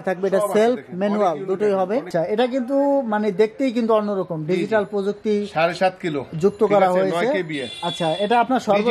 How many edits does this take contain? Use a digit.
1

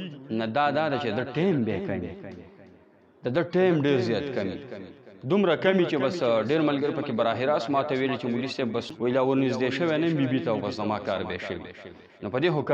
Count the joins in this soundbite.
1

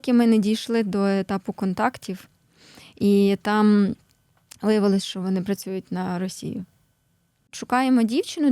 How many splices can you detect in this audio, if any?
1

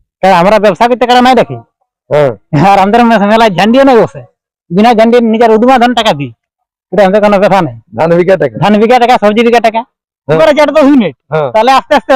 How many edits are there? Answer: 1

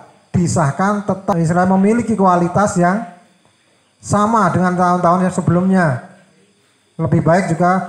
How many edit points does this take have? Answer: 1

